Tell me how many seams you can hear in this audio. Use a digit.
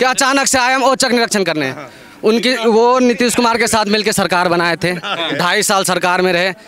0